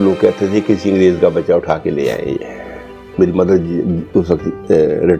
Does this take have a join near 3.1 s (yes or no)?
yes